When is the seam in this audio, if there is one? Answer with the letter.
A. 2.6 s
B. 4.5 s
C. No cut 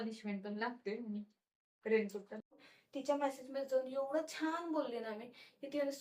A